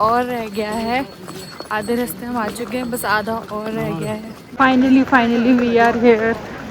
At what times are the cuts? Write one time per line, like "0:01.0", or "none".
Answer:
0:04.4